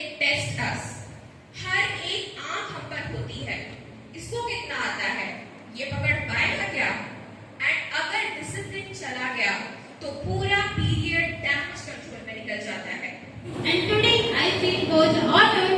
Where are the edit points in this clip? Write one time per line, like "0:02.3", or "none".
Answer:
0:13.6

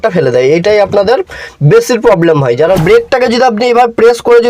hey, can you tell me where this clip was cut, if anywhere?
0:02.8

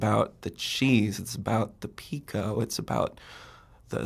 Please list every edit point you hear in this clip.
none

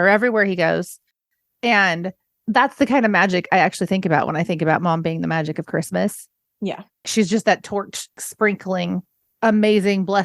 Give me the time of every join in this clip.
0:08.1
0:09.1

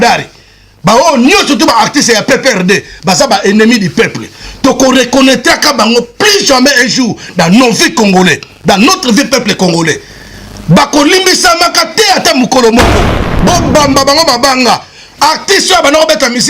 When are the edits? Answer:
0:13.2

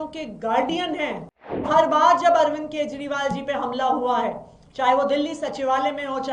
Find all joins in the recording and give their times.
0:01.7

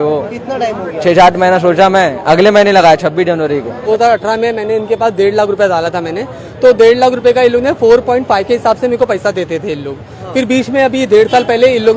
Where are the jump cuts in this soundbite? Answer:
0:03.9

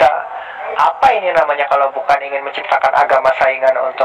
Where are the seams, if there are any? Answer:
none

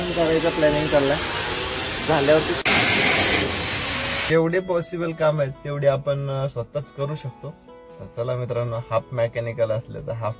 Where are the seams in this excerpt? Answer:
0:04.2

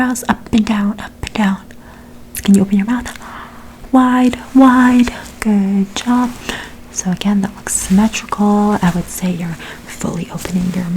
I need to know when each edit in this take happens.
0:02.3

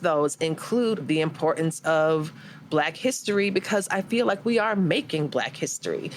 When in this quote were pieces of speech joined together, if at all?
0:01.0

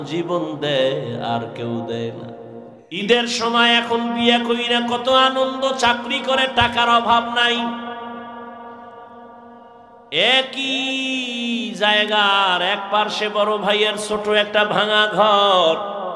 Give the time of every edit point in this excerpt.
0:03.0

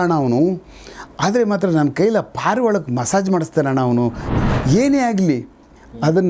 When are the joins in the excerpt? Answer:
0:04.2

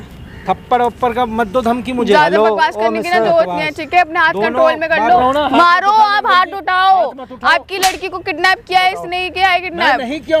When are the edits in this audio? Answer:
0:05.2

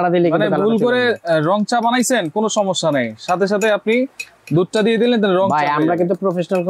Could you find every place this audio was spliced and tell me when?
none

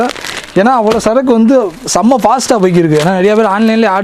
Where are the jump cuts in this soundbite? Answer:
none

